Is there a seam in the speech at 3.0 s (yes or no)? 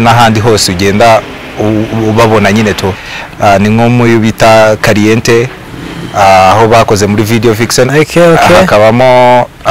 yes